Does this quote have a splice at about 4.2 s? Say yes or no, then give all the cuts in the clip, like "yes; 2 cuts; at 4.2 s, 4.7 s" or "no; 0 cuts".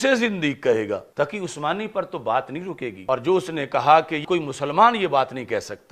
yes; 3 cuts; at 1.1 s, 3.0 s, 4.2 s